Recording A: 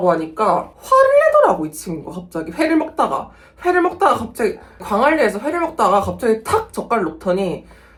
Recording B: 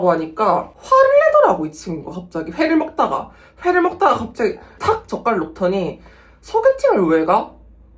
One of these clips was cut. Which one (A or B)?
B